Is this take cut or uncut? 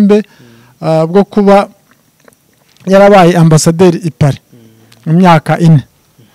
uncut